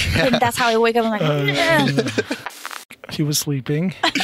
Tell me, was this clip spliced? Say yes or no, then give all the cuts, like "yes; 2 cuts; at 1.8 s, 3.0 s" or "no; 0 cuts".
yes; 1 cut; at 2.6 s